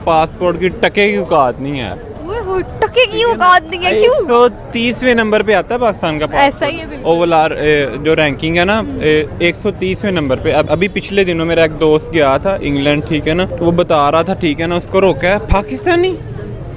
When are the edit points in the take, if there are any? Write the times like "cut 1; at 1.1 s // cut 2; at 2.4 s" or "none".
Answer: none